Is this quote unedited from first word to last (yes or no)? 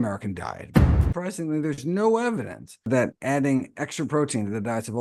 no